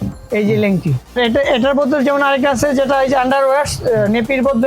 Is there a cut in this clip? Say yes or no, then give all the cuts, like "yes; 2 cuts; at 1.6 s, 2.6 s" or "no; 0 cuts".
yes; 1 cut; at 1.2 s